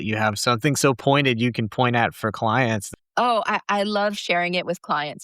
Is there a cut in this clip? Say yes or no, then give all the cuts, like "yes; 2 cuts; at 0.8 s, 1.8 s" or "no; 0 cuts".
yes; 1 cut; at 2.8 s